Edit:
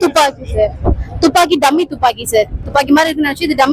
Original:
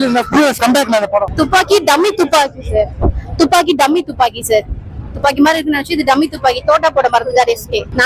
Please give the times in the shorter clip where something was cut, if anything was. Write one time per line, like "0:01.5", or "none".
0:02.6